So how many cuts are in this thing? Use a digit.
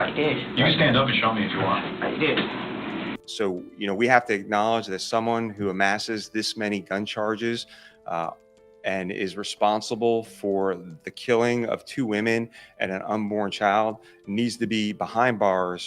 1